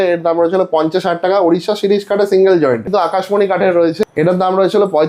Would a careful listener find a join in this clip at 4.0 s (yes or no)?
yes